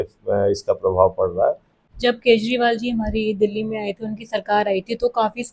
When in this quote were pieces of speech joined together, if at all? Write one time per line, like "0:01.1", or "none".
0:01.7